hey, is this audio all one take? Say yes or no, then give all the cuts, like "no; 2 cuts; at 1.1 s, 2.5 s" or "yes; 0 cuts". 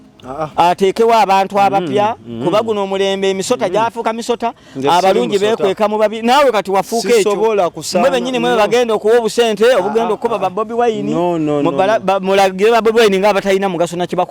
yes; 0 cuts